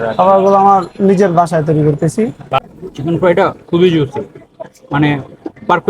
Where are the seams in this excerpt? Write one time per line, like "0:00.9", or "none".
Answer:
0:02.6